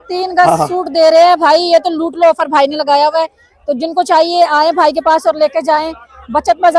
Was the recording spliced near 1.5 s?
no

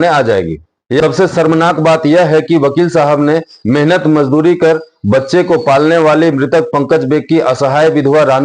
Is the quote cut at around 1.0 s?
yes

